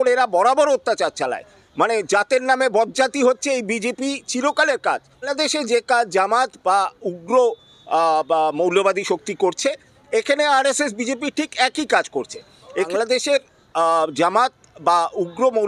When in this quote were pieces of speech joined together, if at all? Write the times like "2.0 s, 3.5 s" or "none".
5.3 s, 12.9 s